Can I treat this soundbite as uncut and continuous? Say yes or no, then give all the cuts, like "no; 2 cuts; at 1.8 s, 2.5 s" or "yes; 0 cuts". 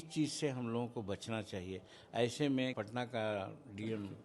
no; 1 cut; at 2.7 s